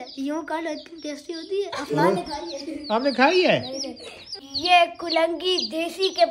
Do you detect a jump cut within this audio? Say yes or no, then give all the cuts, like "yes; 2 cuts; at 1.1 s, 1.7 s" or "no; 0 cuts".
yes; 1 cut; at 4.0 s